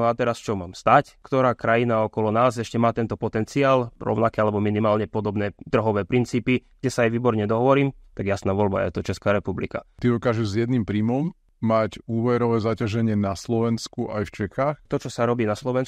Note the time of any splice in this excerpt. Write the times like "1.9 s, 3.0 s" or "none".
1.2 s, 3.9 s, 9.9 s, 11.4 s, 14.9 s

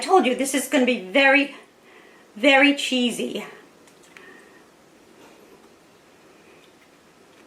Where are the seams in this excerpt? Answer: none

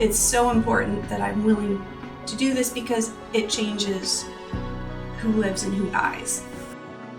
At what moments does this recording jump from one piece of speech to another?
6.1 s

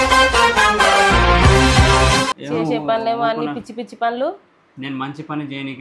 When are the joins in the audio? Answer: none

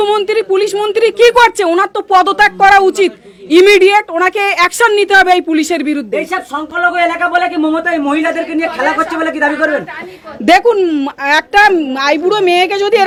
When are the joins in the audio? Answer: none

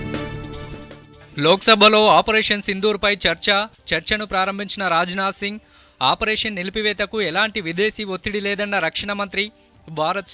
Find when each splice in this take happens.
1.2 s

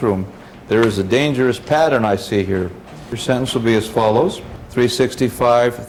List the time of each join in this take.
none

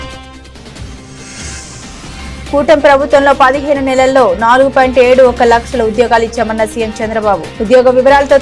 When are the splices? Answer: 2.3 s

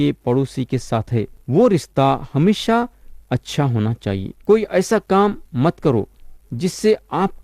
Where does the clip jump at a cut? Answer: 1.4 s, 4.3 s

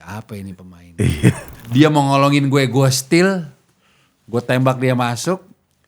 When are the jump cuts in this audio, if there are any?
1.5 s

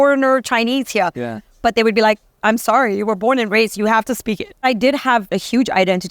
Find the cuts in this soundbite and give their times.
4.6 s, 5.3 s

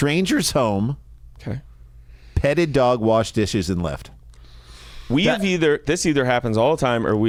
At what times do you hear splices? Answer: none

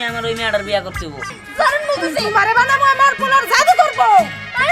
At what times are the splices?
1.4 s

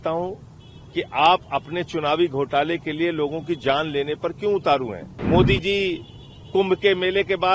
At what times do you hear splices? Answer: 5.1 s

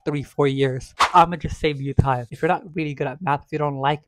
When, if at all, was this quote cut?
1.0 s, 2.3 s

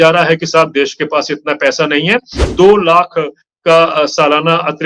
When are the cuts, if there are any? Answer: 2.4 s

